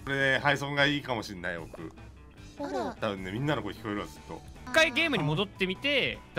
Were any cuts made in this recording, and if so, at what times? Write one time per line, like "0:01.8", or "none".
0:03.0
0:04.7

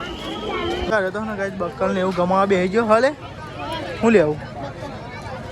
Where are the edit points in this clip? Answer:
0:00.9

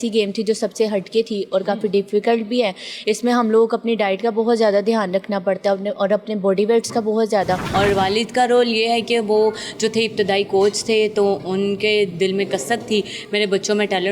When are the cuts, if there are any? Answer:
0:07.7

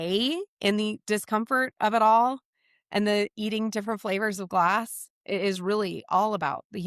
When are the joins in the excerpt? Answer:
none

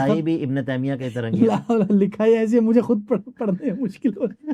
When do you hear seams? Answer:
none

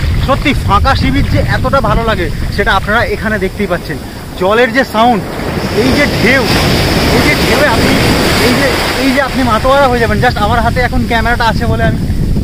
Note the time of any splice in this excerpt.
none

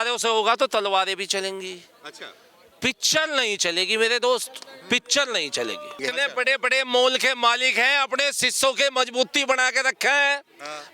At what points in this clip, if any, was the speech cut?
0:06.0

